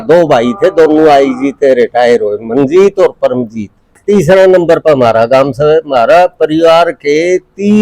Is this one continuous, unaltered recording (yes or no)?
no